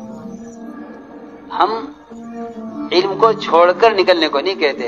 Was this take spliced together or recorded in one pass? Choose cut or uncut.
uncut